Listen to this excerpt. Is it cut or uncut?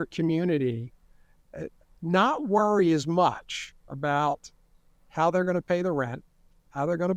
uncut